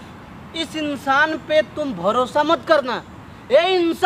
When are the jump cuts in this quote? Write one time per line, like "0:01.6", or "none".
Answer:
none